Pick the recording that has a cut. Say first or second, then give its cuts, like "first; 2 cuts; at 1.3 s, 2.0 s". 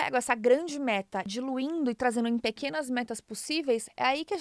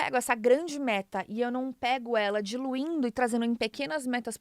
first; 1 cut; at 1.3 s